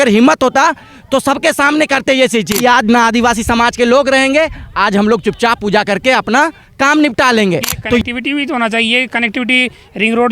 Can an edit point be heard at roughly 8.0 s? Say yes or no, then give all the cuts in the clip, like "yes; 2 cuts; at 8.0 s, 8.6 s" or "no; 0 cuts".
yes; 2 cuts; at 2.5 s, 8.0 s